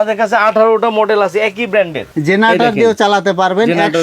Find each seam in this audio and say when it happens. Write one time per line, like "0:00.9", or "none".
0:02.0